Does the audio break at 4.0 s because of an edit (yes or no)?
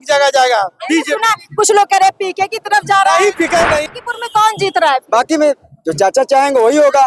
yes